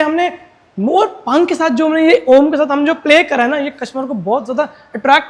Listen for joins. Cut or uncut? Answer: uncut